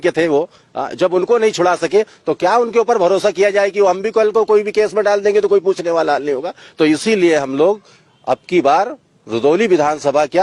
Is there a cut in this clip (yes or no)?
no